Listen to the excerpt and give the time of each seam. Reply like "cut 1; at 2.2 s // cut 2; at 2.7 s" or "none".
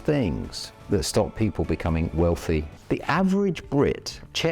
cut 1; at 2.7 s